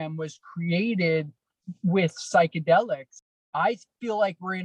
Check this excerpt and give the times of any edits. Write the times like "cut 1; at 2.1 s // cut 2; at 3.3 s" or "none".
cut 1; at 3.2 s